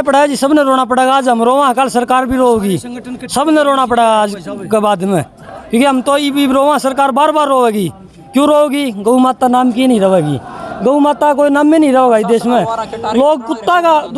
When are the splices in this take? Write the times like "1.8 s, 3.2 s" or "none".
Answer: none